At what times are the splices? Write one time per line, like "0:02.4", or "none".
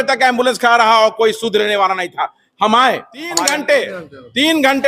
0:03.4